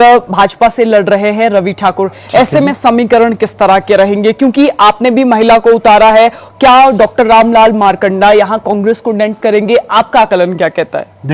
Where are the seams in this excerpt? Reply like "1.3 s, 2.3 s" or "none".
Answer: none

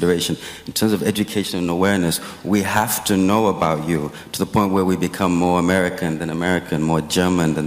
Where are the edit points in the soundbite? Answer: none

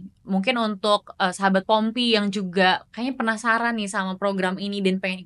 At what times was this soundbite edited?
none

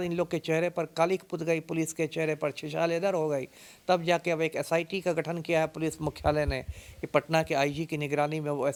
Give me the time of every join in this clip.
none

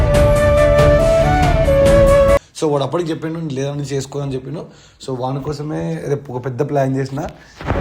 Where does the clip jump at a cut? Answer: none

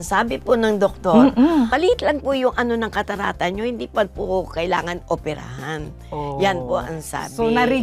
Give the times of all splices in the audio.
1.7 s

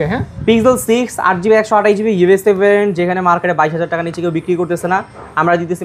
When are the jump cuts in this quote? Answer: none

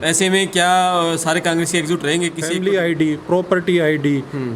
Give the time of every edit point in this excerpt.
2.6 s

